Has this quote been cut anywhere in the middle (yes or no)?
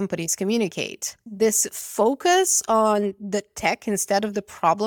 yes